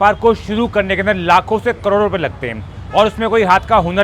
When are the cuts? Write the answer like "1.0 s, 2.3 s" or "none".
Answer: none